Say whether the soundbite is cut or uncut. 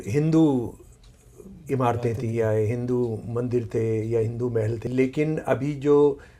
cut